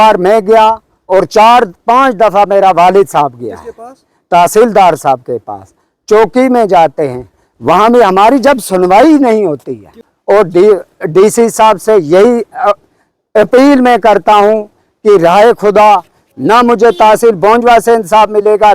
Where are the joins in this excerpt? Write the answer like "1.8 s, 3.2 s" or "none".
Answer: 10.1 s